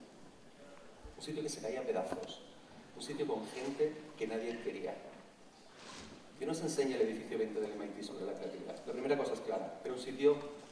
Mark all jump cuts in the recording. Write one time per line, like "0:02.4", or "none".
none